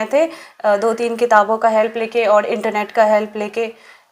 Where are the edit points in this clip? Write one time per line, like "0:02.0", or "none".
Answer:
none